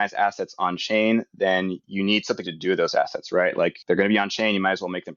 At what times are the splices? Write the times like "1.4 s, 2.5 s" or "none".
3.8 s